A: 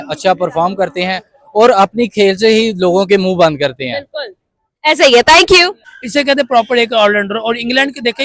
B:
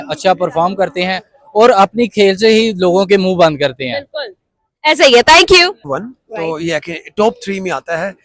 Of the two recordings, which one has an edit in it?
B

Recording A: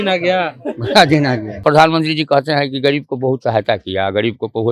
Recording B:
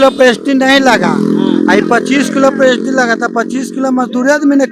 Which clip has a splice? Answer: A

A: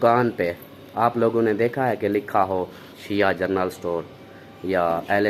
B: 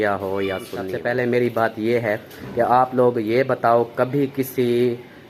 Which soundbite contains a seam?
B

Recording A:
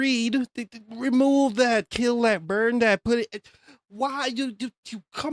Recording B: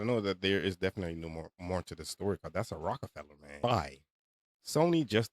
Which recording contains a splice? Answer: B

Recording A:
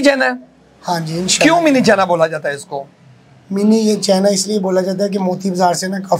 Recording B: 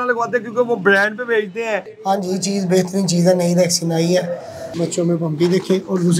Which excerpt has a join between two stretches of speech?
B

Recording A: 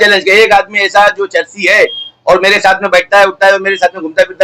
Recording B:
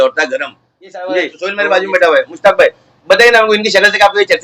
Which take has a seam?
B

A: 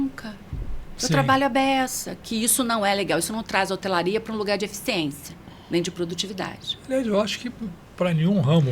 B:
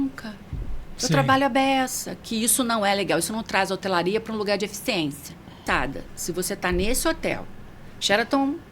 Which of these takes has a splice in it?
B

